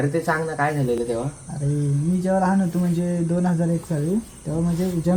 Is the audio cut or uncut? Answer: uncut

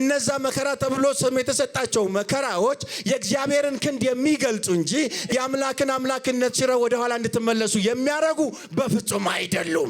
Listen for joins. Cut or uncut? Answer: cut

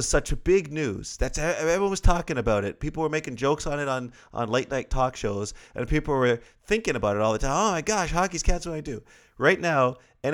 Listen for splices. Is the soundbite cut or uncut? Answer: uncut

